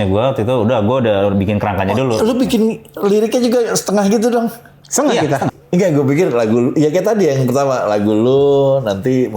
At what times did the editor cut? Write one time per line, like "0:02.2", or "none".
0:05.6